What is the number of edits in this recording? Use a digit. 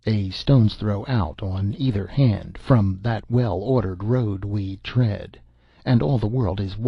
1